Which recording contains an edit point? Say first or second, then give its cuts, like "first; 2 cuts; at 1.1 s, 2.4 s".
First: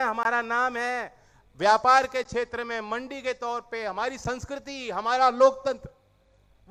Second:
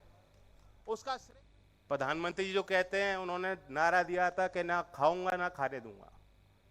second; 1 cut; at 1.0 s